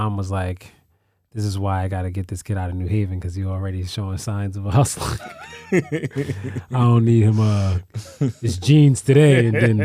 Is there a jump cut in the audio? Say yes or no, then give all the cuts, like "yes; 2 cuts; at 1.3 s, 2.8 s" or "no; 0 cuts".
no; 0 cuts